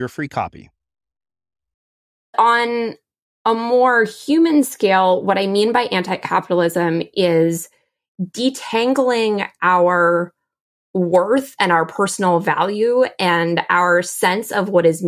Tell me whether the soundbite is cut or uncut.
cut